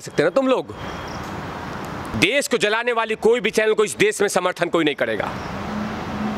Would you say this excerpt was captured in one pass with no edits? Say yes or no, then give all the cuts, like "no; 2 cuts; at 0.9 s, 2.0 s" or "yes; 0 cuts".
no; 1 cut; at 2.1 s